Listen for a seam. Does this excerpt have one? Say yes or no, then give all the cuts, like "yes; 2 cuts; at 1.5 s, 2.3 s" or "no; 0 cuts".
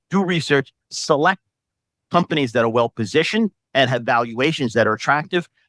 no; 0 cuts